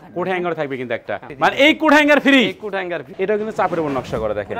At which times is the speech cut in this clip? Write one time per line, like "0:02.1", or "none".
0:01.3
0:03.0